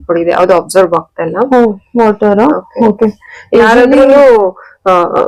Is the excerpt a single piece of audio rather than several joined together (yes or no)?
yes